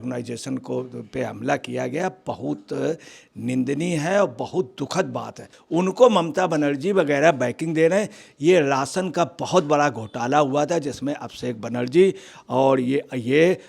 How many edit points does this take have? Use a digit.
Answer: 1